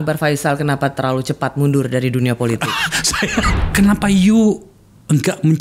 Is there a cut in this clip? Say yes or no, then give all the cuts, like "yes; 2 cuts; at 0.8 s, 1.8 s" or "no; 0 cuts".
yes; 1 cut; at 3.5 s